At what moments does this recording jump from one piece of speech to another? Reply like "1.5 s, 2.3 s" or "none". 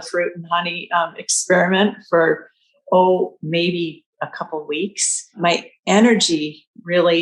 none